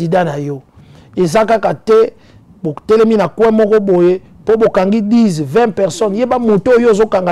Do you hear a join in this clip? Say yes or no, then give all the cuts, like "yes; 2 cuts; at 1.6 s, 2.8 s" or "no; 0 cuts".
no; 0 cuts